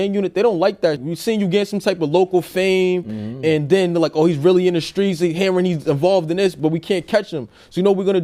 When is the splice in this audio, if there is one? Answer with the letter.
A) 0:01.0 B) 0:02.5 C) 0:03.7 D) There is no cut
A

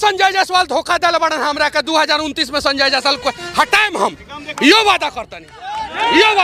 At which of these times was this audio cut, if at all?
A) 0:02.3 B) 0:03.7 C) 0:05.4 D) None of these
D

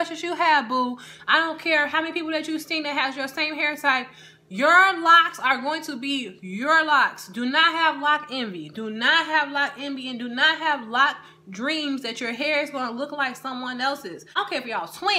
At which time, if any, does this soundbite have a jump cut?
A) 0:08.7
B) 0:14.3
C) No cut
B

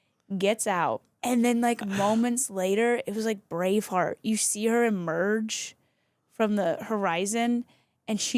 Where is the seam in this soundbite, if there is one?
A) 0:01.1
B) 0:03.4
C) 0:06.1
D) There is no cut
A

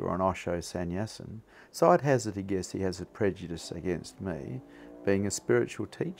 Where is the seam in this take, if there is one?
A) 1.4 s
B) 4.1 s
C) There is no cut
C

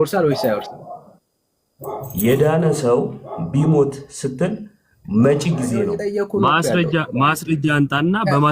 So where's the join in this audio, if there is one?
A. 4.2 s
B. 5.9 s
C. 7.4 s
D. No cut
B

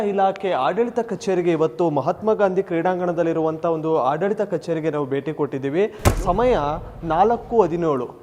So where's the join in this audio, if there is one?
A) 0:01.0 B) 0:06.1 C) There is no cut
B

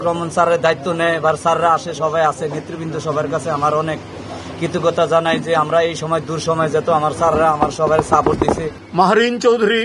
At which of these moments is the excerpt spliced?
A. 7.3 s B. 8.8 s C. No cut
B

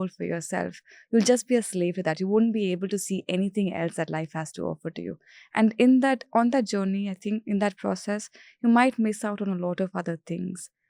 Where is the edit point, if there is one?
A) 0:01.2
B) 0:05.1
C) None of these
C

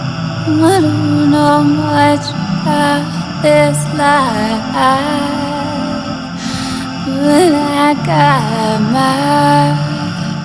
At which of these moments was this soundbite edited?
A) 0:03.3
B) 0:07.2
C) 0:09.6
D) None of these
C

